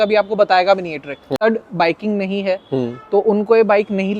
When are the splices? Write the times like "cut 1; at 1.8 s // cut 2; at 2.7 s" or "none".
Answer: cut 1; at 1.4 s

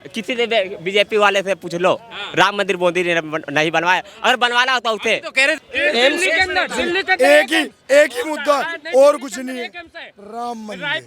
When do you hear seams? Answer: cut 1; at 5.6 s

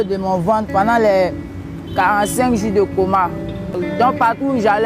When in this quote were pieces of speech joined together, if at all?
cut 1; at 3.8 s

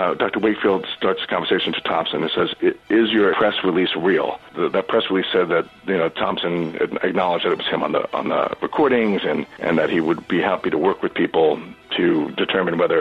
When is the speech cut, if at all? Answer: cut 1; at 3.4 s // cut 2; at 4.5 s // cut 3; at 9.5 s

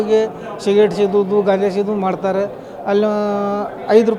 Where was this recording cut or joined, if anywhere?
none

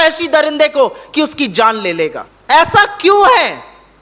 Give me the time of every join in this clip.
cut 1; at 2.3 s

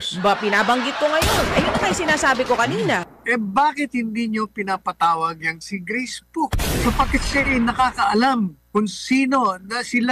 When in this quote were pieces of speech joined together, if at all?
cut 1; at 3.1 s // cut 2; at 6.8 s

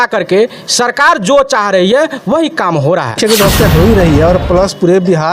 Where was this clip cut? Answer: cut 1; at 3.2 s

